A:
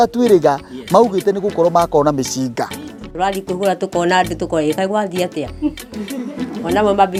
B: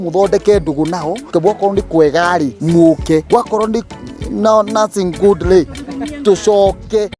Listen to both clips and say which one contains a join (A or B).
B